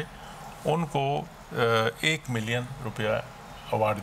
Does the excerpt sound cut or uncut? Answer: uncut